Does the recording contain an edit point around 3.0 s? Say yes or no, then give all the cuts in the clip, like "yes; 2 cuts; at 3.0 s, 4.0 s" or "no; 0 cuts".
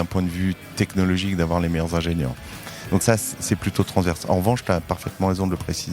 yes; 1 cut; at 3.0 s